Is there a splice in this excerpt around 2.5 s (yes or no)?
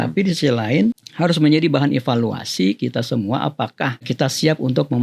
no